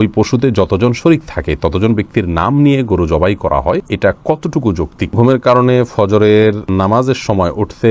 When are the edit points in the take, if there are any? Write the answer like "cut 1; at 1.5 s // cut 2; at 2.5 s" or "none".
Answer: cut 1; at 3.9 s // cut 2; at 5.1 s // cut 3; at 6.6 s